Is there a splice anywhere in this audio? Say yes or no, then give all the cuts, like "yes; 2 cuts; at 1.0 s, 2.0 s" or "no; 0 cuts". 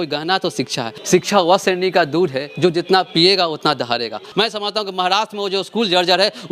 yes; 2 cuts; at 1.0 s, 4.2 s